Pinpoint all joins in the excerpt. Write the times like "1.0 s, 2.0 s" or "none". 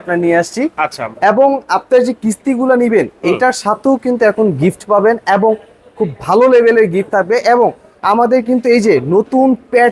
none